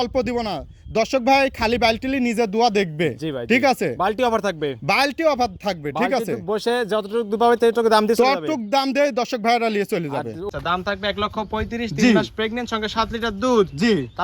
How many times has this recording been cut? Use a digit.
1